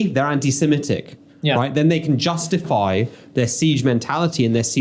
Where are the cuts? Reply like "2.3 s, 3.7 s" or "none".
none